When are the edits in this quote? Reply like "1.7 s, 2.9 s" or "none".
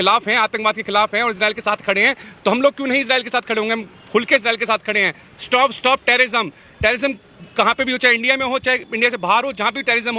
none